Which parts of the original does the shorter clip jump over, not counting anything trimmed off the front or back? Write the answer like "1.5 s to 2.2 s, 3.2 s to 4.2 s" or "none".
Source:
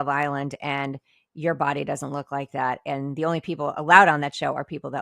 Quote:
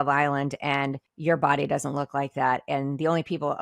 1.0 s to 1.2 s